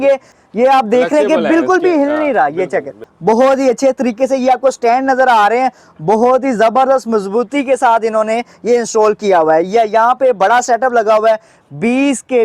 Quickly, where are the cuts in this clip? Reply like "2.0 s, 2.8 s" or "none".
3.0 s